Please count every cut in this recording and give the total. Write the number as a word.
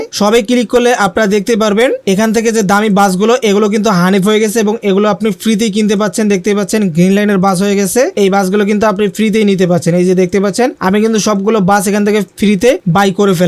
zero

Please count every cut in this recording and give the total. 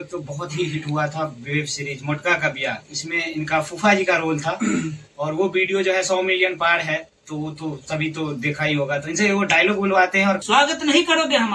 one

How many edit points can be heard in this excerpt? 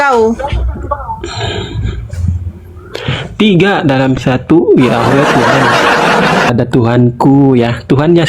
one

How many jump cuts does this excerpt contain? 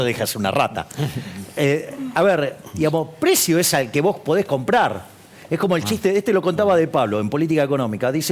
zero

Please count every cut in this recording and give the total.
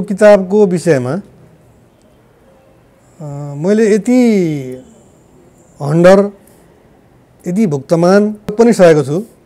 one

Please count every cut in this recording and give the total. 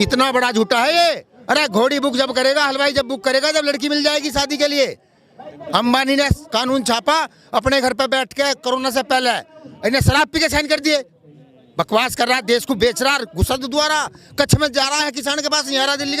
one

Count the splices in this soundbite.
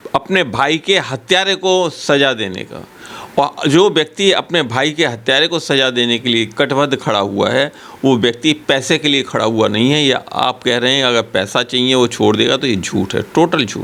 zero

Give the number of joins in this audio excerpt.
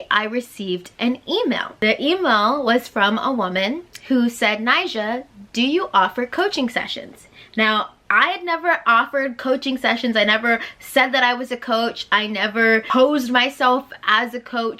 two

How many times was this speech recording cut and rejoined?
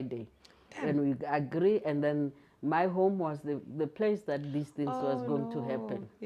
zero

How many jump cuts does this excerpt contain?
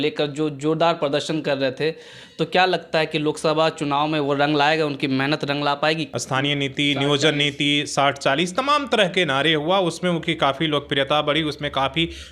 one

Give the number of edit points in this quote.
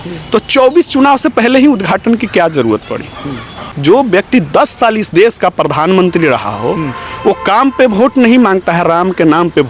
one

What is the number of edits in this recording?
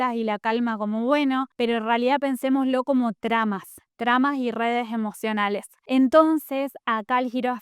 one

